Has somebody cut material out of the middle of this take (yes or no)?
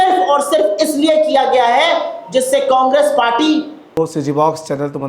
yes